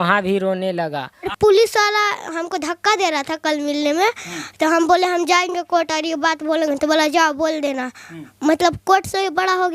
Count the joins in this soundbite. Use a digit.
1